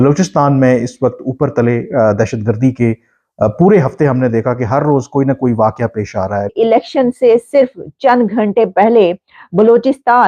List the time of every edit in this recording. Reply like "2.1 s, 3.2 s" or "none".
6.5 s